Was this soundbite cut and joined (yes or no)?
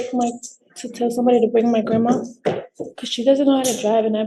no